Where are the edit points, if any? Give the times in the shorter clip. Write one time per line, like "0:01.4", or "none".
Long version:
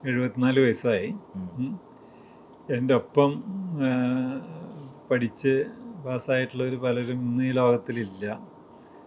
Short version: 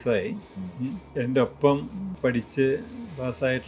0:01.0
0:02.0